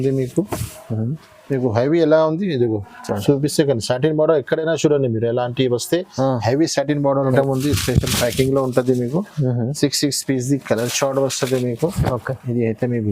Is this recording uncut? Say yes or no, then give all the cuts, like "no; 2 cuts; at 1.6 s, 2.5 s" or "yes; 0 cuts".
no; 1 cut; at 7.3 s